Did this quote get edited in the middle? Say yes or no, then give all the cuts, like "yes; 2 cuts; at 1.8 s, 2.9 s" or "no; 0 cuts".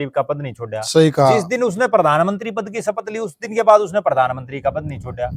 no; 0 cuts